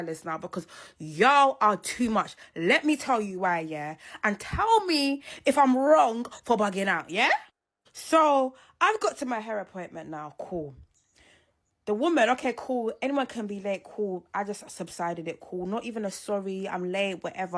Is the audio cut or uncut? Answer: uncut